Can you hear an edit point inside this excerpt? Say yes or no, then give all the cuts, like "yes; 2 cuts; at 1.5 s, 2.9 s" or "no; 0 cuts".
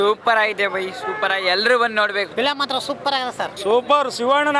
no; 0 cuts